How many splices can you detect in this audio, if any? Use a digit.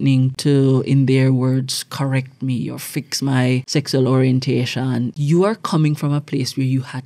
2